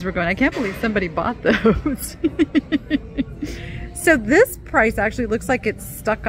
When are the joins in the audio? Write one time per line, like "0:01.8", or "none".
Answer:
none